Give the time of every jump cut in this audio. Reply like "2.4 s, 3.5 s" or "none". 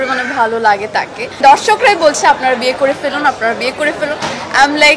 1.3 s

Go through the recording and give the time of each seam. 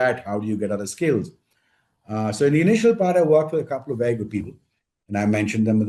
none

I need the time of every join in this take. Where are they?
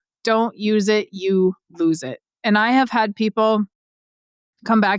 none

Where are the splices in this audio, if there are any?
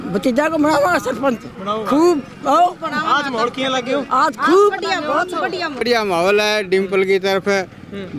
5.8 s

